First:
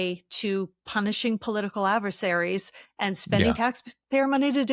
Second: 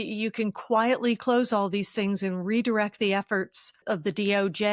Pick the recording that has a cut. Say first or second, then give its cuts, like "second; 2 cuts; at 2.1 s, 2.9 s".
second; 1 cut; at 3.8 s